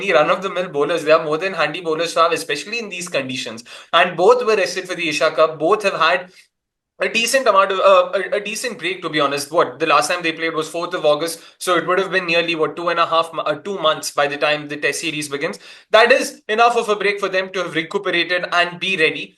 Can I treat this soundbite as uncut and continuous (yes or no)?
yes